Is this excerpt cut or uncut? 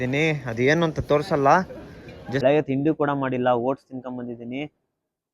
cut